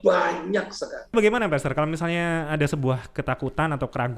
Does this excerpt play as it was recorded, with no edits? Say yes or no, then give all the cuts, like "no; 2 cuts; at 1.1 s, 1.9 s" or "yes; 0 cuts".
no; 1 cut; at 1.1 s